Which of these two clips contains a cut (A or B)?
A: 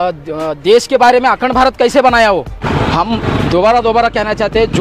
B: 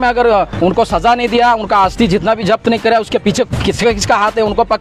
A